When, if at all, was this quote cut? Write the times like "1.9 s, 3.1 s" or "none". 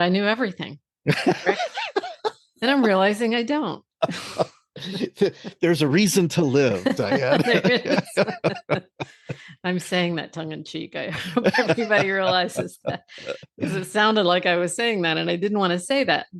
none